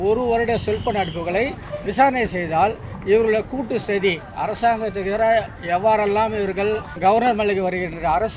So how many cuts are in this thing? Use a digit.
2